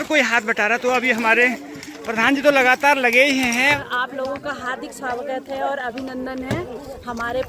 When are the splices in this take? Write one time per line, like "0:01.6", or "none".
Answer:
0:03.7